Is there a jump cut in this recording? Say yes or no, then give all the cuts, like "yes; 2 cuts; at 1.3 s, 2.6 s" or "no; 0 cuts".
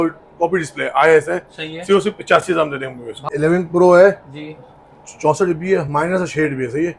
yes; 1 cut; at 3.2 s